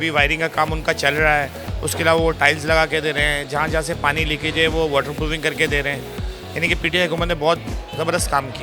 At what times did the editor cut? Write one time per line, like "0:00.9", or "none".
none